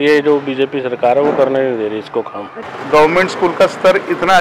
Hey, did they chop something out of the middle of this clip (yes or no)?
yes